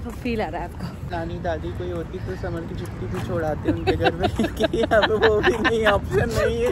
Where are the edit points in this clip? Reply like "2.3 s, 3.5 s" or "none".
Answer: 1.1 s

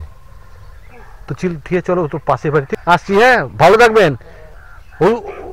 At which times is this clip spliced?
2.7 s

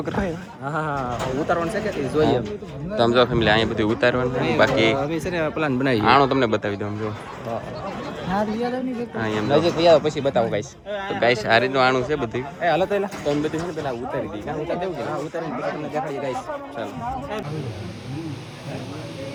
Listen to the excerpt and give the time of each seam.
none

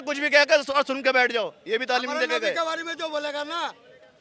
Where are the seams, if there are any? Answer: none

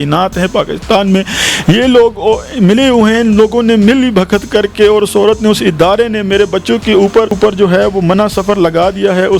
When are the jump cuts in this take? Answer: 7.4 s

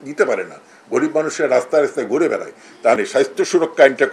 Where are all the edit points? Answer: 3.0 s

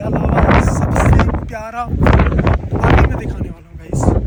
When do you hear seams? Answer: none

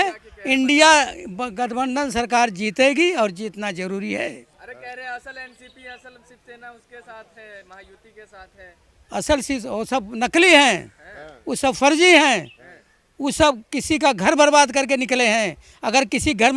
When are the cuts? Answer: none

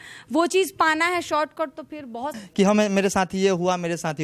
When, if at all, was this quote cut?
2.3 s

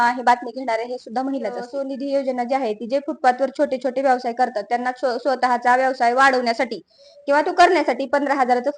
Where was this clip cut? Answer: 1.7 s

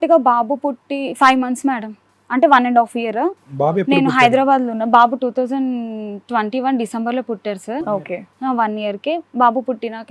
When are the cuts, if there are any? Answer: none

